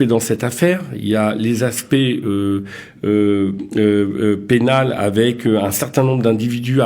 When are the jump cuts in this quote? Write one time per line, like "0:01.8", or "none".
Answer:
none